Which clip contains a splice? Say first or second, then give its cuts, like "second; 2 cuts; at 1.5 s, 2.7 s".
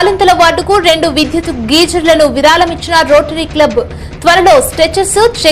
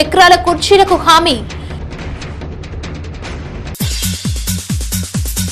second; 2 cuts; at 2.0 s, 3.2 s